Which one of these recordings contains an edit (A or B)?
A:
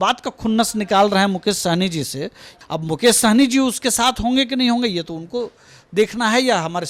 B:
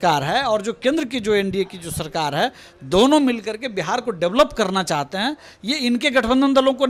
A